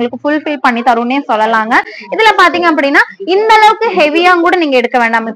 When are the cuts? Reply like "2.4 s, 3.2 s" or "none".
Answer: none

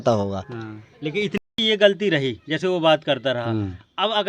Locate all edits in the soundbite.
1.4 s

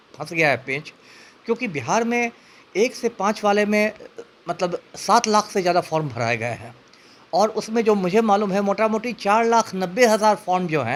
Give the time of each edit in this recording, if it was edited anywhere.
none

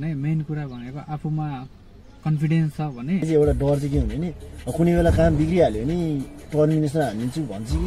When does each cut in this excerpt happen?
3.3 s

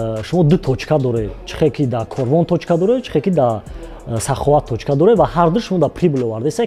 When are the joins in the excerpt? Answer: none

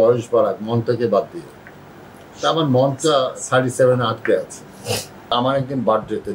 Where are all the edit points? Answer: 5.3 s

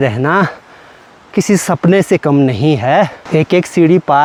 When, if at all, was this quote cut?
none

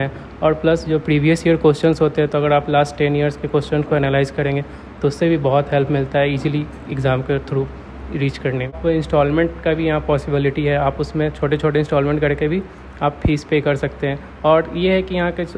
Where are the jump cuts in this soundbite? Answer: 8.8 s

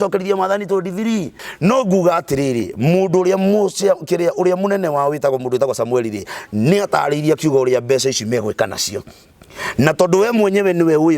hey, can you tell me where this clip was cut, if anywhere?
1.4 s

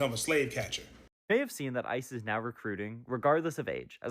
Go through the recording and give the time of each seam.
1.1 s

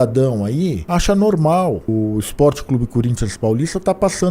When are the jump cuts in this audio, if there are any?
0.8 s, 1.9 s

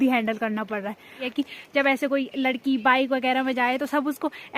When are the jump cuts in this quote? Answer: 1.3 s

